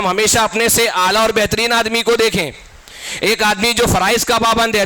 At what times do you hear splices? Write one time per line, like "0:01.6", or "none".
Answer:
none